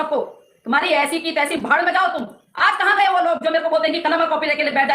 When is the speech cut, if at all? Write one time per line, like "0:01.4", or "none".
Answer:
0:02.4